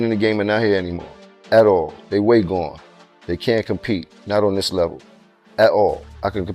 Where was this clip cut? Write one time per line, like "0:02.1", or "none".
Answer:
none